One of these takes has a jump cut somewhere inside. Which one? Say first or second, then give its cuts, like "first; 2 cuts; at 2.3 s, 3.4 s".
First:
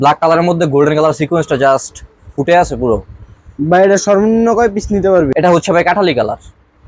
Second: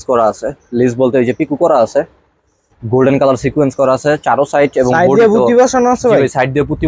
first; 1 cut; at 5.3 s